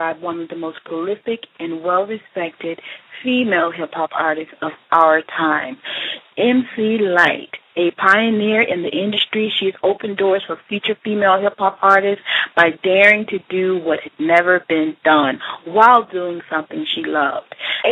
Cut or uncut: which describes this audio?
cut